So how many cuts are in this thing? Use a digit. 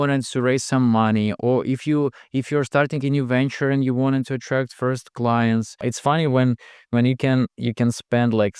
1